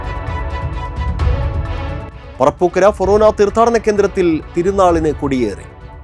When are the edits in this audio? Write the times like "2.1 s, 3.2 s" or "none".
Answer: none